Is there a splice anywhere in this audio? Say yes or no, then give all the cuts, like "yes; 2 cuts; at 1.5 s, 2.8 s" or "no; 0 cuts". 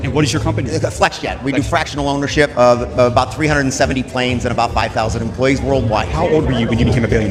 no; 0 cuts